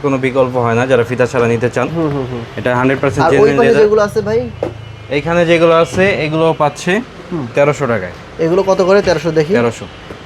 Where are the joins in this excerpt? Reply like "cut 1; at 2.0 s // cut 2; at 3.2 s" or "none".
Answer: none